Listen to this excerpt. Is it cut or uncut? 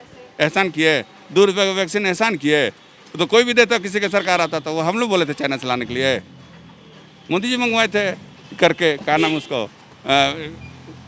uncut